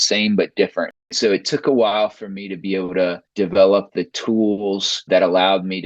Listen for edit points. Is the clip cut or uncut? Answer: cut